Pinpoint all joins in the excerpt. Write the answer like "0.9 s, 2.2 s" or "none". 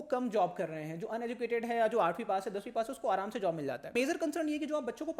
3.9 s